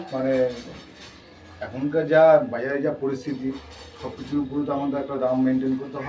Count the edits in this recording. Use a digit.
0